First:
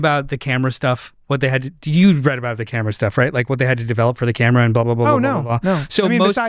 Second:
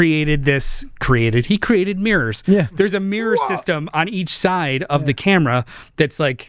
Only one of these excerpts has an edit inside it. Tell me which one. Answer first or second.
first